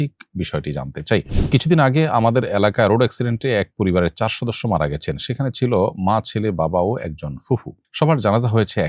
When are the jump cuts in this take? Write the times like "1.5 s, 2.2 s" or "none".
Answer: 1.4 s